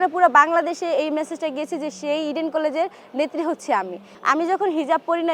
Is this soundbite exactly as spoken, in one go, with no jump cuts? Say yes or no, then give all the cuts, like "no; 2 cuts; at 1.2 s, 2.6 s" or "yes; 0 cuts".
no; 1 cut; at 4.0 s